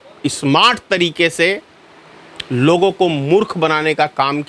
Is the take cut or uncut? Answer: uncut